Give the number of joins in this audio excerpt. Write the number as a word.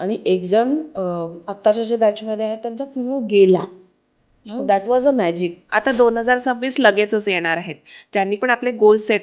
two